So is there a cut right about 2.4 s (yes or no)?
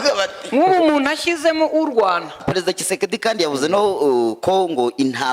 yes